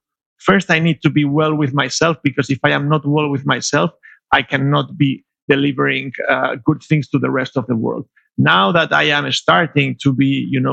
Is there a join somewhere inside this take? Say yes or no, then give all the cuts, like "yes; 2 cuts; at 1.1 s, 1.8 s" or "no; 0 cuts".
yes; 1 cut; at 5.4 s